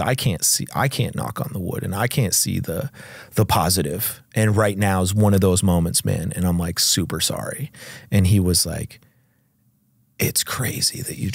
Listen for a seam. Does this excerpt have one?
no; 0 cuts

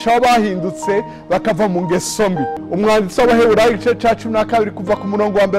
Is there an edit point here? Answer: yes; 1 cut; at 2.6 s

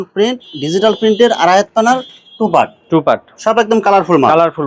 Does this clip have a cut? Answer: no; 0 cuts

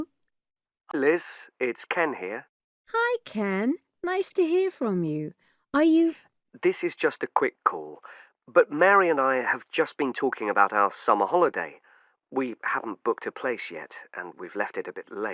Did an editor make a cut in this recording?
yes; 1 cut; at 0.9 s

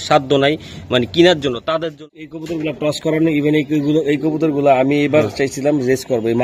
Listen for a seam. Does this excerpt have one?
yes; 1 cut; at 2.0 s

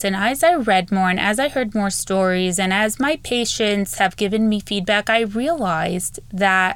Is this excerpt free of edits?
yes; 0 cuts

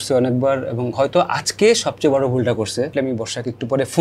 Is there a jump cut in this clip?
yes; 1 cut; at 2.9 s

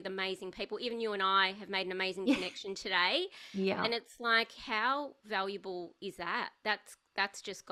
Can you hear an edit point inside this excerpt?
no; 0 cuts

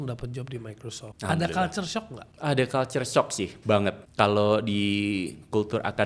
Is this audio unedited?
no; 3 cuts; at 1.1 s, 2.2 s, 4.0 s

